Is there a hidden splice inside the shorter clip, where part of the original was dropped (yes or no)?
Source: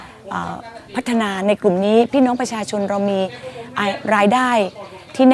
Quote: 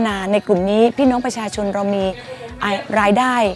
no